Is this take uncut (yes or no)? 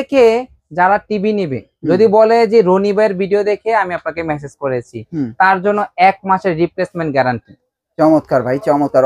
yes